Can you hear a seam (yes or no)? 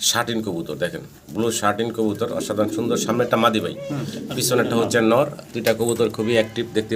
no